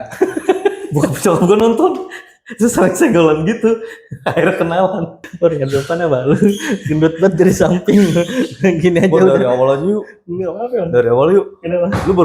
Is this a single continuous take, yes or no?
no